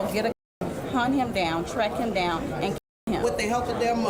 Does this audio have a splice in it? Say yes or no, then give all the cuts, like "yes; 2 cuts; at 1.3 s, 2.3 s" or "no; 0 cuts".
no; 0 cuts